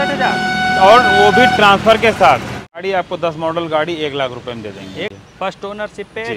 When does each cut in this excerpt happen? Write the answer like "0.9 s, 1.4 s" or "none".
2.8 s, 5.1 s